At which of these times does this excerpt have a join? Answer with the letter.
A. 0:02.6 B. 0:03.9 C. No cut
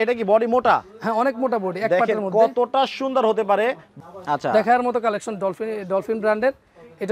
B